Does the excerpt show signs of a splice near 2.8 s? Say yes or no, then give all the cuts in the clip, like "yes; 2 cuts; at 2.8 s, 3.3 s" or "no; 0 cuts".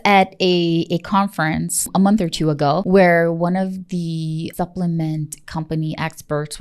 yes; 3 cuts; at 1.8 s, 2.8 s, 4.5 s